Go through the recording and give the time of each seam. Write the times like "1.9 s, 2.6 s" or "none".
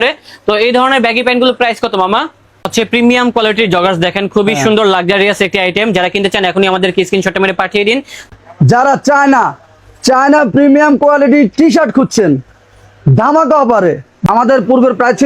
2.6 s, 8.2 s, 14.1 s

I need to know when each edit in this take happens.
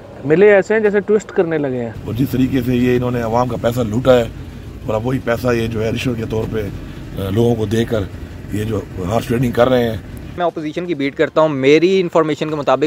2.0 s, 10.4 s

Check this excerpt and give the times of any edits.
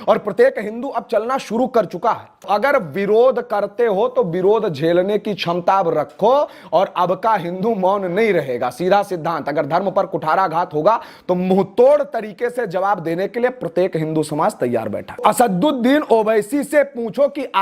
2.4 s, 15.2 s

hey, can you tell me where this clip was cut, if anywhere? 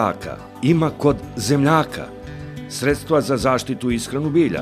none

